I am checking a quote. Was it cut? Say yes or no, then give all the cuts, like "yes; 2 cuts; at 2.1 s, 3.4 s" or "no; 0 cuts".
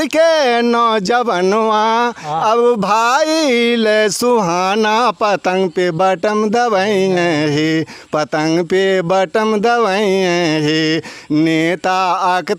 no; 0 cuts